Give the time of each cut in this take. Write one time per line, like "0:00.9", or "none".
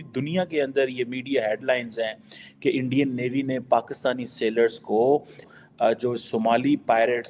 0:05.5

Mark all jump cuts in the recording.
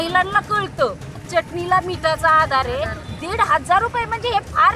0:01.3
0:03.0

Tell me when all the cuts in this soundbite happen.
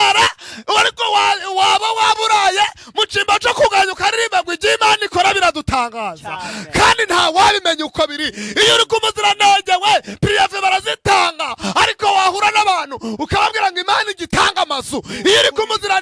none

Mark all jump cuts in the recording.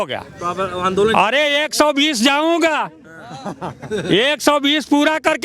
none

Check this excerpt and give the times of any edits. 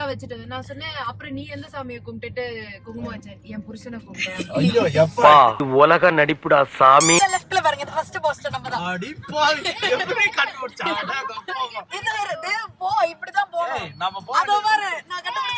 0:07.2

